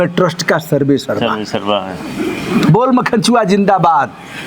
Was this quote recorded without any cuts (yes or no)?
yes